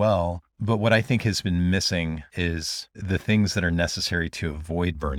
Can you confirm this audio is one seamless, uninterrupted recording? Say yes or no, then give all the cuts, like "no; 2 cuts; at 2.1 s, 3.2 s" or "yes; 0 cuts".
yes; 0 cuts